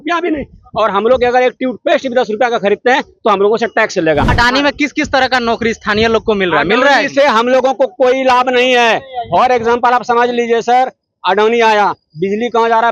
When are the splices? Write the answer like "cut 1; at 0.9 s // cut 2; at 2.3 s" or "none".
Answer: cut 1; at 4.3 s